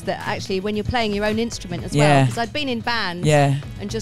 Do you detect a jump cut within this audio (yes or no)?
no